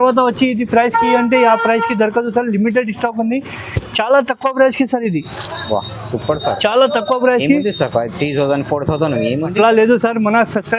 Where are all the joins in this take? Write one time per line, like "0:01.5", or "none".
none